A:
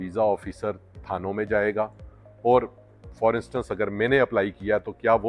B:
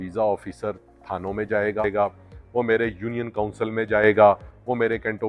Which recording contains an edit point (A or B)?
B